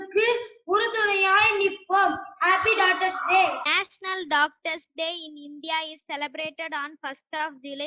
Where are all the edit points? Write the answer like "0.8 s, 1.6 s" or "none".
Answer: 3.7 s